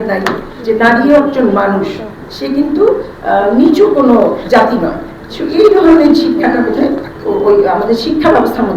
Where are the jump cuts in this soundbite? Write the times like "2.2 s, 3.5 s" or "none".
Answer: none